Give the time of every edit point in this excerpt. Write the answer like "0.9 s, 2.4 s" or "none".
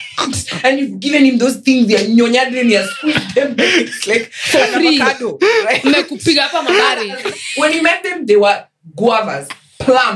7.2 s